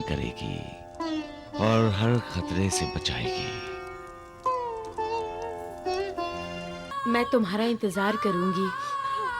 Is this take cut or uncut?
cut